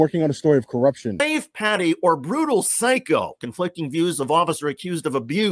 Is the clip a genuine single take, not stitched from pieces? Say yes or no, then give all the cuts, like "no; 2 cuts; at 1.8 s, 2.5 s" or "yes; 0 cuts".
no; 1 cut; at 1.2 s